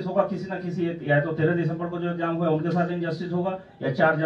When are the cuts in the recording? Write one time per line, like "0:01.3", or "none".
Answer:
none